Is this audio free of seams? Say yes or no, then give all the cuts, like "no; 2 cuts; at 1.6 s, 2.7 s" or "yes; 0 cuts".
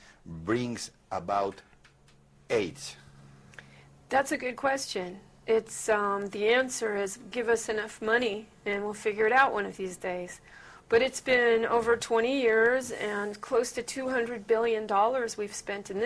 yes; 0 cuts